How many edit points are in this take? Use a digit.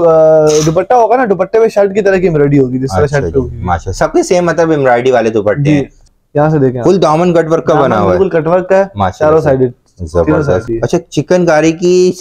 2